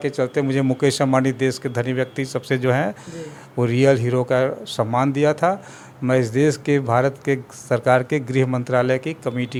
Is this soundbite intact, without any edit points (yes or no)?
yes